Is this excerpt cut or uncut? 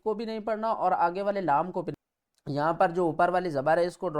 cut